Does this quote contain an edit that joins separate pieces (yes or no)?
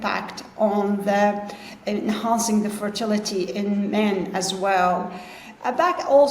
no